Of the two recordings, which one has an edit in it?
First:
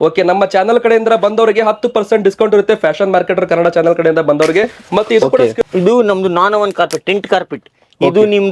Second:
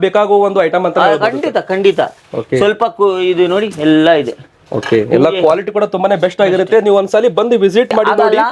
first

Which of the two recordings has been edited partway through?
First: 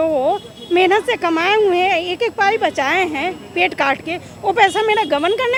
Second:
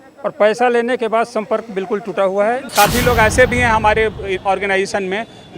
second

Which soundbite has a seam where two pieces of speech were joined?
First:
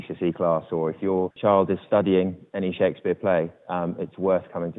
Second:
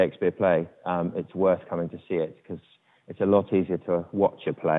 first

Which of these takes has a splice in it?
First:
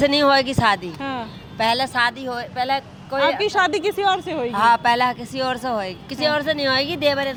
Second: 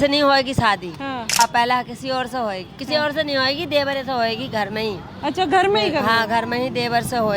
second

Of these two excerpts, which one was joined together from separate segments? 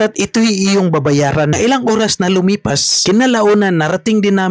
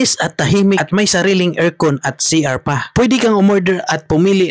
first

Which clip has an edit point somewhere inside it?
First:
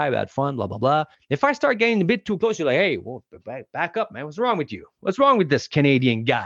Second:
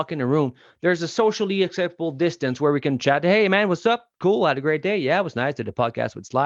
first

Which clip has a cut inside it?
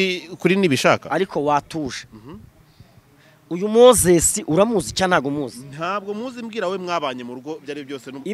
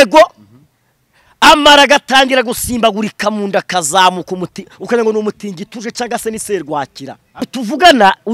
second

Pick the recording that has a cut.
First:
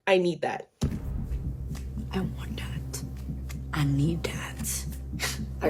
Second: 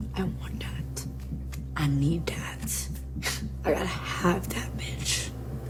first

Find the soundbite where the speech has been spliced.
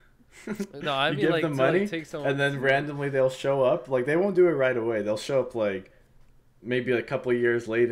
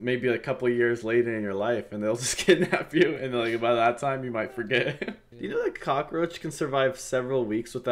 second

